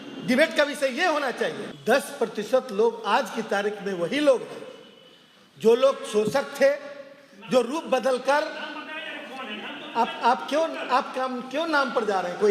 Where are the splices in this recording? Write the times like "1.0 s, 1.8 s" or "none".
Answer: 1.7 s